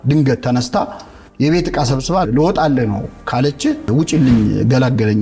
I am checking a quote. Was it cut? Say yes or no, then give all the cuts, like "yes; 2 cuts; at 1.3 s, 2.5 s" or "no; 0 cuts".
yes; 2 cuts; at 2.3 s, 3.9 s